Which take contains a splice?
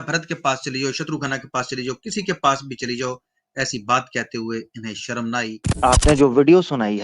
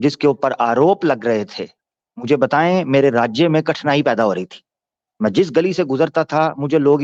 first; 1 cut; at 5.6 s

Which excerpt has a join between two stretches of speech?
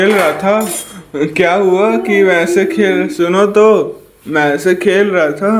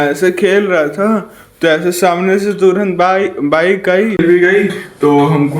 second; 1 cut; at 4.2 s

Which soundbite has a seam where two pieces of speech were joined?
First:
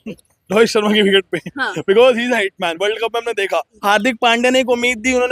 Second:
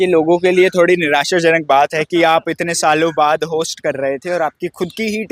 first; 1 cut; at 3.7 s

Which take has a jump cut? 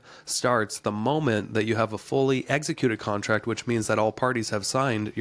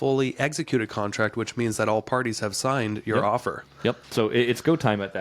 second; 1 cut; at 4.0 s

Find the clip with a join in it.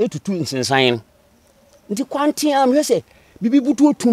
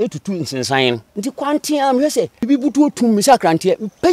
second; 2 cuts; at 1.1 s, 2.4 s

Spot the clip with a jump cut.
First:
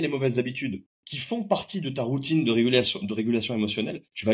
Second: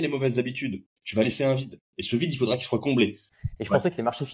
second; 2 cuts; at 1.0 s, 3.3 s

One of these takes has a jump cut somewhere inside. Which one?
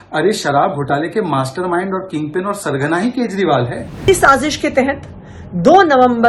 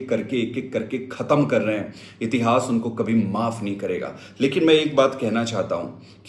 first; 1 cut; at 4.1 s

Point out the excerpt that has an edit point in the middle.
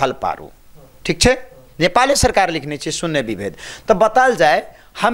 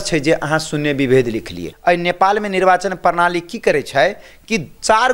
second; 1 cut; at 1.7 s

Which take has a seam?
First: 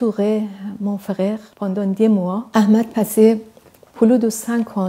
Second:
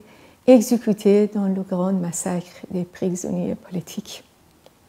first; 2 cuts; at 1.5 s, 2.5 s

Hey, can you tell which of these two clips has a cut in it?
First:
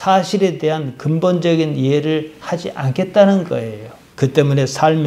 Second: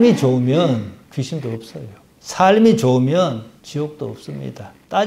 first; 1 cut; at 4.0 s

